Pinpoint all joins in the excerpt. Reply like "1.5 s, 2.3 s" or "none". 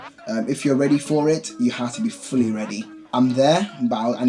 2.9 s